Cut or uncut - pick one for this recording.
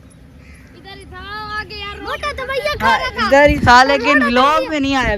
uncut